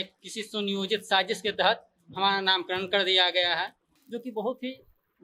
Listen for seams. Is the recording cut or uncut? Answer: uncut